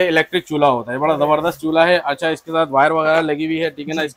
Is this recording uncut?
yes; 0 cuts

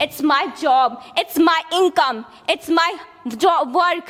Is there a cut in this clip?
no; 0 cuts

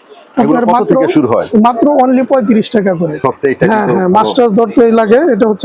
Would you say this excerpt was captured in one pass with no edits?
no; 1 cut; at 3.2 s

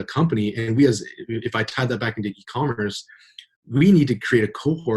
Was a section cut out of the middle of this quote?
no; 0 cuts

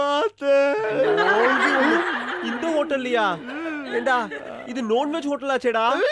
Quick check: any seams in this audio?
no; 0 cuts

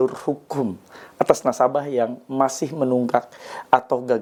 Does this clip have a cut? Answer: no; 0 cuts

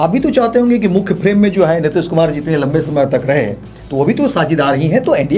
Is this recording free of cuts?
yes; 0 cuts

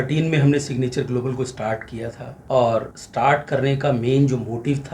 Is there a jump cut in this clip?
yes; 1 cut; at 3.0 s

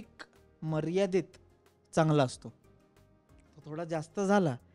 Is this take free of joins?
yes; 0 cuts

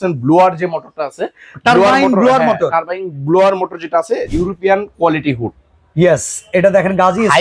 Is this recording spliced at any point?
yes; 1 cut; at 4.3 s

